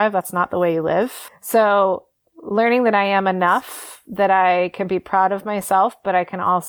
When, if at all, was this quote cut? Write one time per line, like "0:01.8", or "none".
0:01.2